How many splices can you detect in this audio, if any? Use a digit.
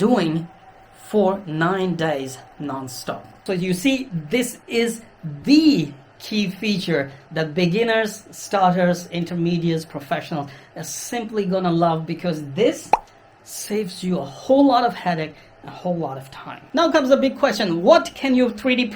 2